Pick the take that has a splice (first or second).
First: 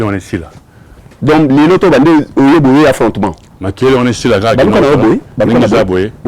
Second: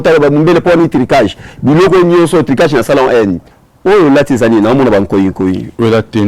second